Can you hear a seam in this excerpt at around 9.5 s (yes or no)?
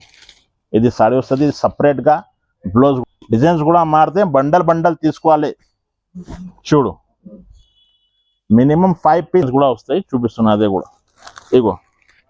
yes